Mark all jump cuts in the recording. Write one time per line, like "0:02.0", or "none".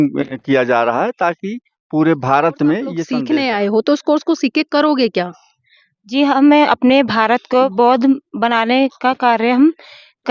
0:03.1
0:07.7